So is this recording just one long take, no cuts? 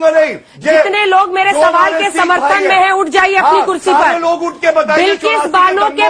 yes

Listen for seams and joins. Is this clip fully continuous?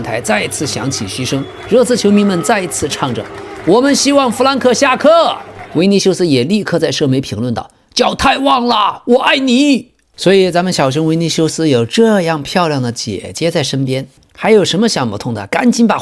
no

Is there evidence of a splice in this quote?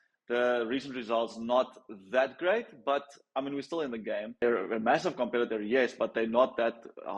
yes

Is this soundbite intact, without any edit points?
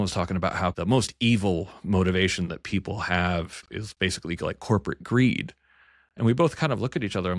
no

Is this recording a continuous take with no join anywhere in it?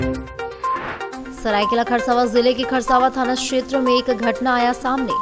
yes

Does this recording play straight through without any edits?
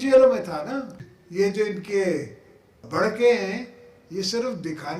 no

